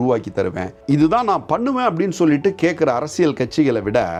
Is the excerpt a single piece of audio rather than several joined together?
yes; 0 cuts

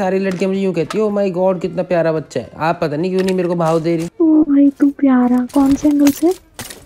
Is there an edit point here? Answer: yes; 1 cut; at 4.1 s

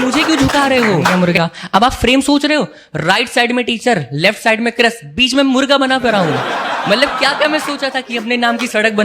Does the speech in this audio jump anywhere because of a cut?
yes; 1 cut; at 1.4 s

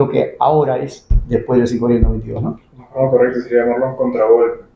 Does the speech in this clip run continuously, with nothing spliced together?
yes; 0 cuts

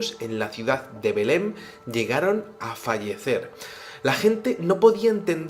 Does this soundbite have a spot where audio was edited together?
no; 0 cuts

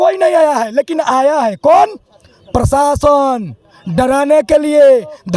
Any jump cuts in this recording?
no; 0 cuts

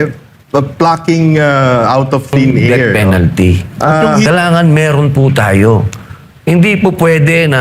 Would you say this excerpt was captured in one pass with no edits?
no; 1 cut; at 2.9 s

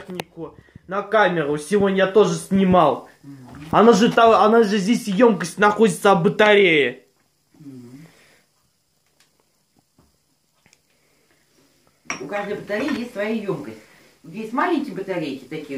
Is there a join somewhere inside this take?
no; 0 cuts

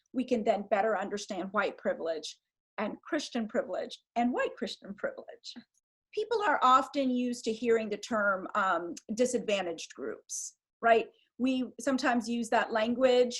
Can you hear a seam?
yes; 1 cut; at 6.0 s

